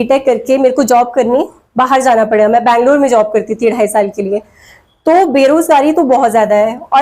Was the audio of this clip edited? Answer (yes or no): no